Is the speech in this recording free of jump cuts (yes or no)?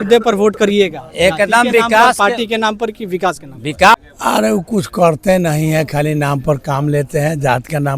no